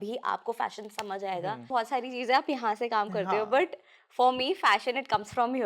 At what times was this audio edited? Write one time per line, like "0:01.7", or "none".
0:01.7